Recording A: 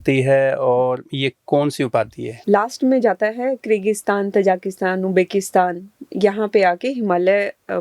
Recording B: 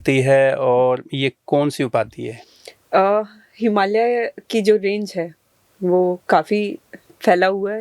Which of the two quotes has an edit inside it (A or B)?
A